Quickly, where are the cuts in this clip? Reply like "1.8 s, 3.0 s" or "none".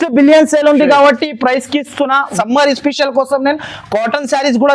2.3 s